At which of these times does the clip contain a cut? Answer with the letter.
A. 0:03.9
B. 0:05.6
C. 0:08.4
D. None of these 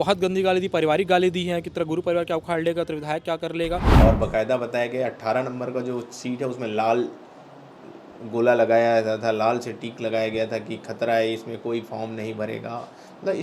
A